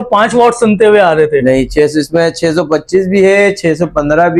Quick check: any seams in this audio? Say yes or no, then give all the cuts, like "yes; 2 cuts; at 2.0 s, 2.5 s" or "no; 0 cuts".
no; 0 cuts